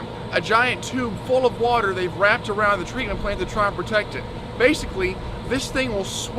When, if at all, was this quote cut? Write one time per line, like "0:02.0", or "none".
none